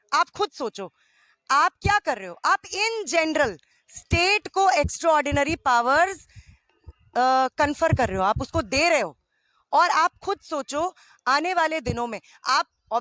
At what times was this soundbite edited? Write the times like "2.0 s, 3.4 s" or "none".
none